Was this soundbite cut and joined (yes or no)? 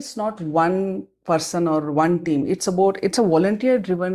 no